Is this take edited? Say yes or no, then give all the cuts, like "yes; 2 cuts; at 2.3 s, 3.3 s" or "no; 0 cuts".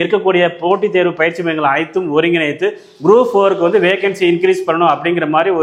no; 0 cuts